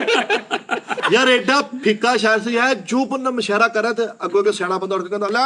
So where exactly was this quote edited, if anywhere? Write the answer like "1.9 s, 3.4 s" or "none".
1.0 s